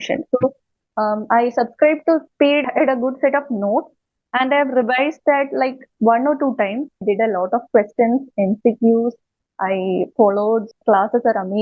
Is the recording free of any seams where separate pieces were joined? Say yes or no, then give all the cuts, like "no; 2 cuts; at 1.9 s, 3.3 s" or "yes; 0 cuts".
no; 3 cuts; at 2.6 s, 7.0 s, 10.8 s